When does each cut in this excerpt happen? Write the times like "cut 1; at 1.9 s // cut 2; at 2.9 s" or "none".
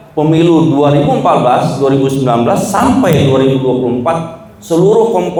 none